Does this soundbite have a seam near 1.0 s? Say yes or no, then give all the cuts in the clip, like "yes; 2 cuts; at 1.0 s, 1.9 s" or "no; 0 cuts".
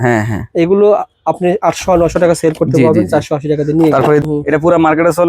no; 1 cut; at 4.2 s